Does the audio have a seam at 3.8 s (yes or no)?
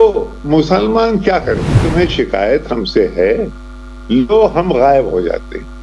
no